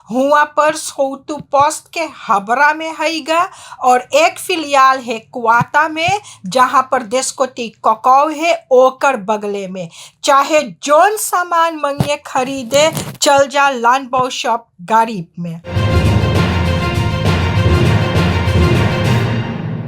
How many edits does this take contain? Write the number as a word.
one